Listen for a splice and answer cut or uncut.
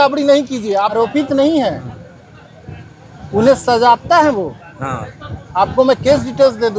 cut